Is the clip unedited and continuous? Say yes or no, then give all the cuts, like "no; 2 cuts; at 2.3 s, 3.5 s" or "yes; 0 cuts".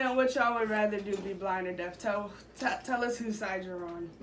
yes; 0 cuts